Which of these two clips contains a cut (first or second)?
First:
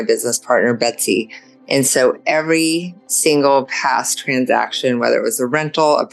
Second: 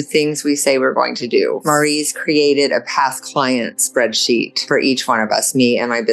second